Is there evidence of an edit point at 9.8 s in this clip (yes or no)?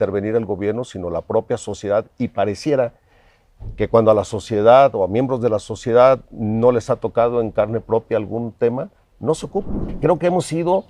yes